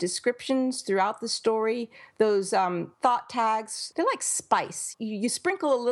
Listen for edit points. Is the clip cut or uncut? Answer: cut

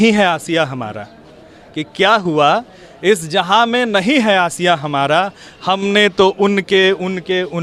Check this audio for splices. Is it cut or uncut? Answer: uncut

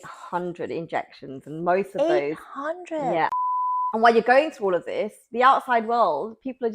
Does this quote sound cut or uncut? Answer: cut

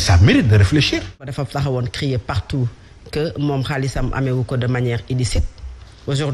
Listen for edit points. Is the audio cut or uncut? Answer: cut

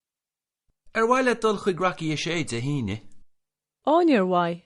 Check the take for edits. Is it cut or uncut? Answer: uncut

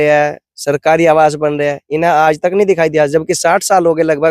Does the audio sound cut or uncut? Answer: uncut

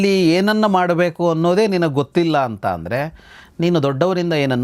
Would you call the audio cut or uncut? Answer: uncut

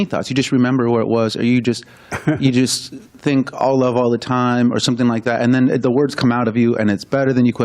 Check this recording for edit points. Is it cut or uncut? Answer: uncut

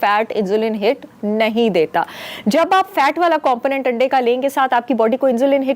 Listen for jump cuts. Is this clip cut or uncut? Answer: uncut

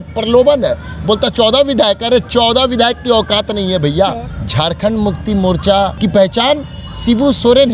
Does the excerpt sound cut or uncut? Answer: cut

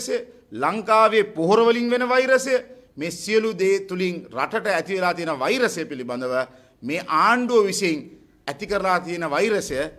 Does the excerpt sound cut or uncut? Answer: uncut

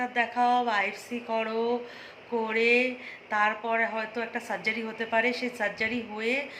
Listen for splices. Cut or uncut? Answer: uncut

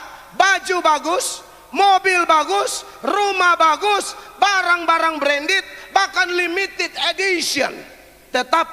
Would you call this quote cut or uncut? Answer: uncut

